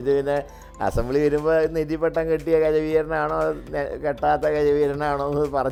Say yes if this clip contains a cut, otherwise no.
no